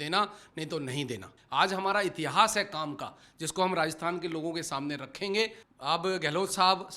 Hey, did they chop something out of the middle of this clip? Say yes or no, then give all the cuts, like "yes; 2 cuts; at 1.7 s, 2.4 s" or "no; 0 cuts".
yes; 2 cuts; at 1.3 s, 5.6 s